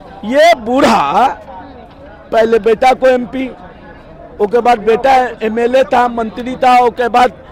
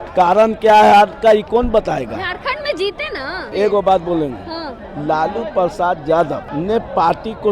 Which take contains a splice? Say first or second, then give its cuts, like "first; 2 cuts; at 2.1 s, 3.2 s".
second; 2 cuts; at 3.5 s, 6.5 s